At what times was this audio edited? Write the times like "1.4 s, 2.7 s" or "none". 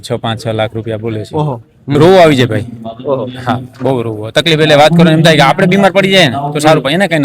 1.9 s